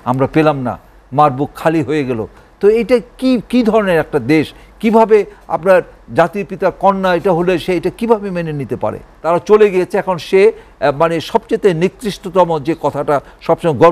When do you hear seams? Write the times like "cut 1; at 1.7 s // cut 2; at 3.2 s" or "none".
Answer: cut 1; at 9.1 s